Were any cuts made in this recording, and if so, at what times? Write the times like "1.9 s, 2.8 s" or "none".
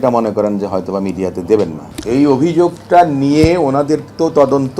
1.9 s